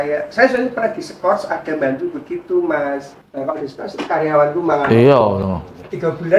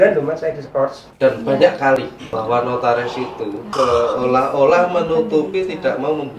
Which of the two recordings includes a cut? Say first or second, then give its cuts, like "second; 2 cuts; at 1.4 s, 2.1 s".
second; 3 cuts; at 1.0 s, 2.2 s, 3.7 s